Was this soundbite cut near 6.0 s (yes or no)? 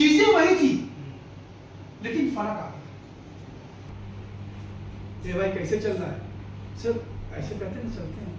no